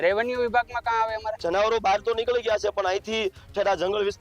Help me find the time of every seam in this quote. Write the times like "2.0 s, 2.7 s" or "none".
1.3 s